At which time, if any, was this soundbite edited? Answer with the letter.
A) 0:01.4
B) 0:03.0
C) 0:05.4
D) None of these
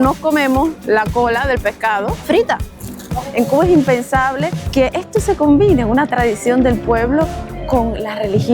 B